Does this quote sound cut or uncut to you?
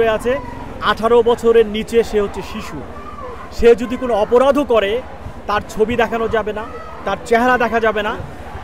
uncut